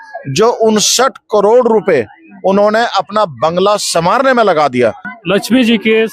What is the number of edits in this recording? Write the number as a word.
one